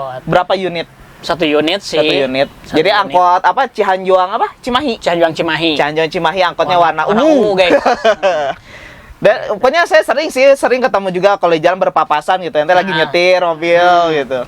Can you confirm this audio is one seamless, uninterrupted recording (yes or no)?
yes